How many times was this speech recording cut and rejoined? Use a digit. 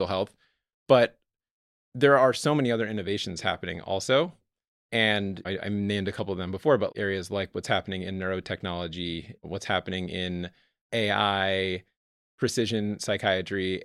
1